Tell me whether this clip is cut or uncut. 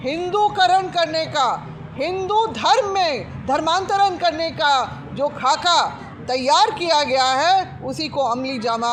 uncut